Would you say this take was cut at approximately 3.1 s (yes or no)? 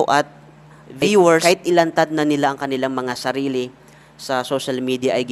no